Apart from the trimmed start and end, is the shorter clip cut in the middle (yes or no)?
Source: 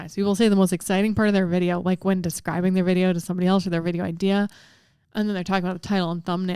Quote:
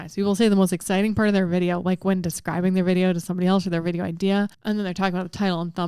yes